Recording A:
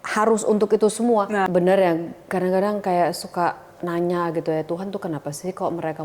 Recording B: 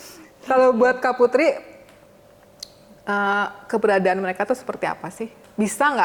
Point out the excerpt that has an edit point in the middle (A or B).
A